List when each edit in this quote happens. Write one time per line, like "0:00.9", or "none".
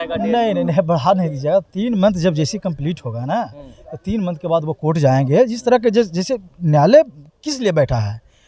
none